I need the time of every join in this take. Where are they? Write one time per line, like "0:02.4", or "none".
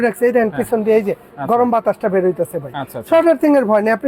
none